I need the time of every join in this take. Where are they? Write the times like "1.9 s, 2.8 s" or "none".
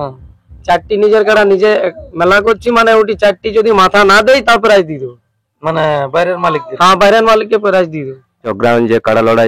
8.5 s